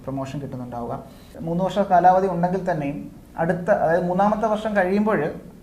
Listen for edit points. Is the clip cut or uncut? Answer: cut